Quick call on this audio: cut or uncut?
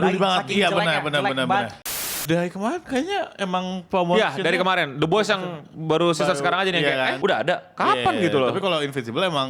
cut